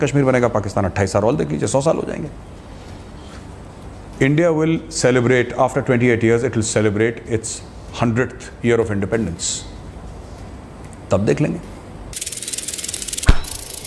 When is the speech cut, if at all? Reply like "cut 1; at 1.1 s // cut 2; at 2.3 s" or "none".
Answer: none